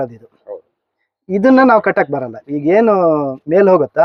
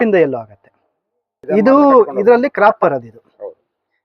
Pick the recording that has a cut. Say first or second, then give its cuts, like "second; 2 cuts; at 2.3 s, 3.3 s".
second; 1 cut; at 1.4 s